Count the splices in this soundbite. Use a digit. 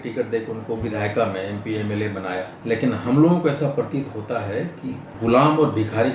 2